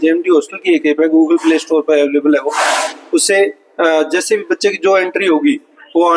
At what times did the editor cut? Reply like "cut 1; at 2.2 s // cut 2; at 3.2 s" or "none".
none